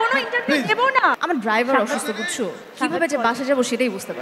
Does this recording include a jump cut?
yes; 1 cut; at 1.2 s

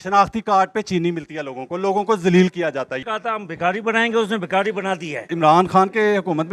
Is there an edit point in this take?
yes; 2 cuts; at 2.9 s, 5.3 s

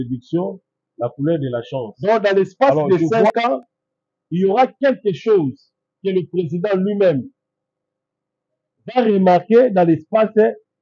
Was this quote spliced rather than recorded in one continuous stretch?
yes; 1 cut; at 1.9 s

